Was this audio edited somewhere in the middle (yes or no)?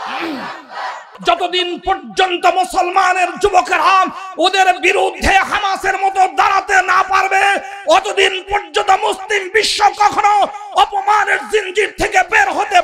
yes